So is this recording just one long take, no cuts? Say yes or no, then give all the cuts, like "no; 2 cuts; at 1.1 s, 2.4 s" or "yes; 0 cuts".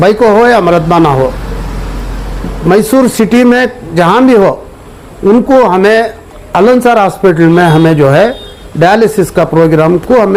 yes; 0 cuts